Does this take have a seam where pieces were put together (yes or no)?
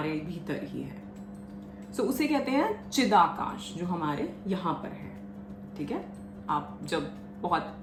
no